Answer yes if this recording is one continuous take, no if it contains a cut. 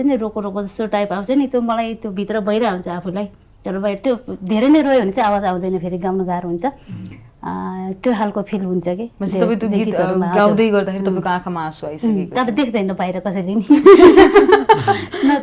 yes